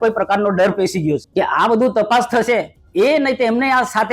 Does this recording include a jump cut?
yes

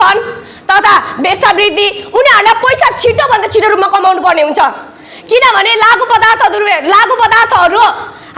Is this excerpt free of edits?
yes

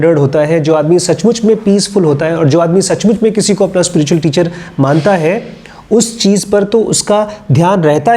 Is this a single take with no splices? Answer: yes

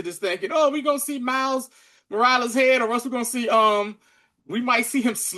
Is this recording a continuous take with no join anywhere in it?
yes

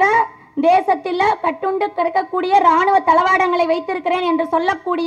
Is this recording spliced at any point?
no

